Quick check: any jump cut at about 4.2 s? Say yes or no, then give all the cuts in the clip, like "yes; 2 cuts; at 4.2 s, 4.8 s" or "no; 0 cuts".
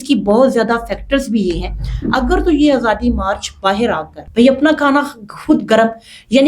yes; 1 cut; at 4.2 s